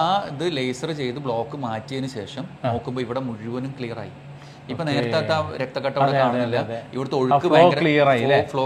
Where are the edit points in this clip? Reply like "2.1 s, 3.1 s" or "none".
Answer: none